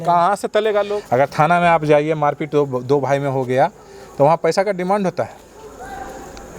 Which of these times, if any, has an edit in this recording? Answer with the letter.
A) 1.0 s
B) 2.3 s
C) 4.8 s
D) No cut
A